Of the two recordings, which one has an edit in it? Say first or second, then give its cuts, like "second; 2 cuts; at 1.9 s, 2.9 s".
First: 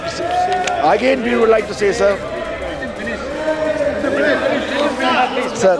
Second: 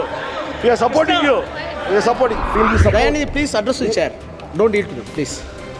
second; 1 cut; at 2.4 s